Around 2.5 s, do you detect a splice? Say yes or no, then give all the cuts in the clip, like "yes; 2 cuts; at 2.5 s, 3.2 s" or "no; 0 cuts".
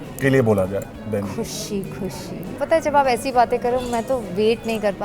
yes; 1 cut; at 2.5 s